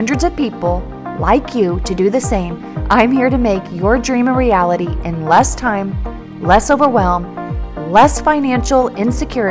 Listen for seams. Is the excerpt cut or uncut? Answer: uncut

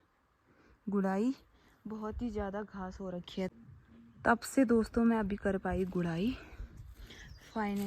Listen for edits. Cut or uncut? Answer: cut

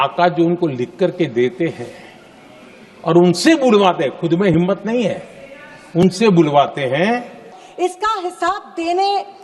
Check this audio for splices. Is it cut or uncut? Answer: cut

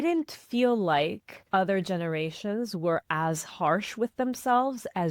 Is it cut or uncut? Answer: cut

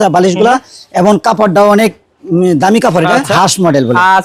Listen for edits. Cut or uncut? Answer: cut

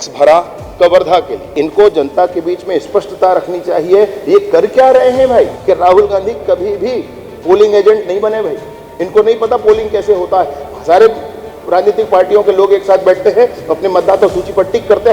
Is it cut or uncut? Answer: cut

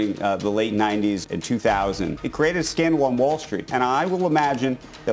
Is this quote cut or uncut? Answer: cut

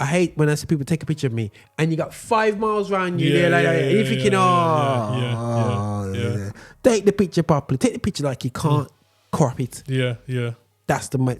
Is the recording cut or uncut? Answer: uncut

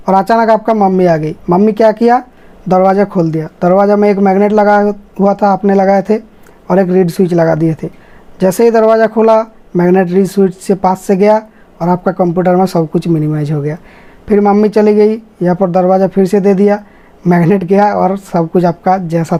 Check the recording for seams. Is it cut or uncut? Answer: uncut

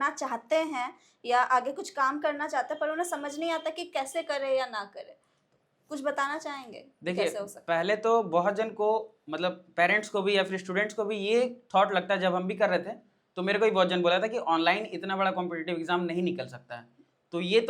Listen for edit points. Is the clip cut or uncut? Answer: uncut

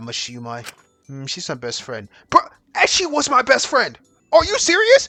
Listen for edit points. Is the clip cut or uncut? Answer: uncut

